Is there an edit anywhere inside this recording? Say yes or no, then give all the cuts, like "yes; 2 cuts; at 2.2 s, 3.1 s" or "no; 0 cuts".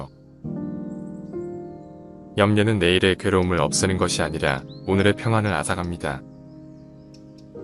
yes; 1 cut; at 6.2 s